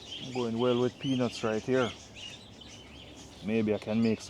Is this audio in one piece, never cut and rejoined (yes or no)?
no